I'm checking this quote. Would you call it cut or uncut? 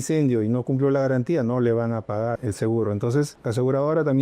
cut